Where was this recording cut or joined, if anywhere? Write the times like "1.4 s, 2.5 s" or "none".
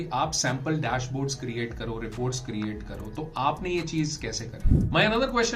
4.6 s